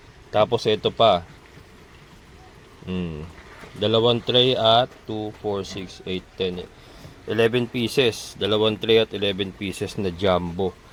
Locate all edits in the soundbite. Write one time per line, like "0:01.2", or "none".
none